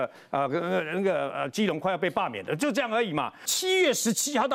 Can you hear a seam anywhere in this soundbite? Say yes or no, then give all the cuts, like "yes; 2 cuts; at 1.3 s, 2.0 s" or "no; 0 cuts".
yes; 1 cut; at 3.5 s